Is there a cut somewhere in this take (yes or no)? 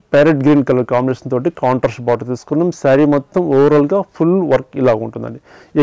no